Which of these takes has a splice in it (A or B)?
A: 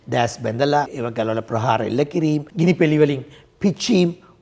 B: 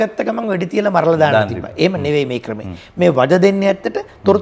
A